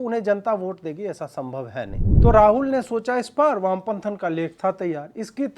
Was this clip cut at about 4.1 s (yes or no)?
no